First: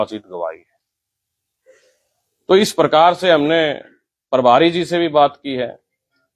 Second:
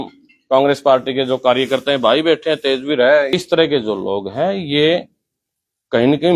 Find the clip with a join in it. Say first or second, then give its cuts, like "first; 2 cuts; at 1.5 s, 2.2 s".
second; 1 cut; at 3.3 s